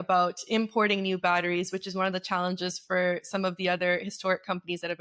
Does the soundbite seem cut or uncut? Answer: uncut